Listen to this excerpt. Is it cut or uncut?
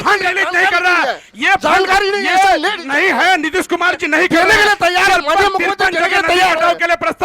uncut